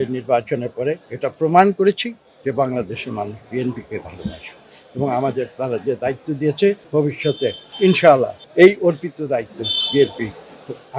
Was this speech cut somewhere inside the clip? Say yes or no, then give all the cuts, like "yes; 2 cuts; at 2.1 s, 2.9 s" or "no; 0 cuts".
yes; 2 cuts; at 6.8 s, 8.4 s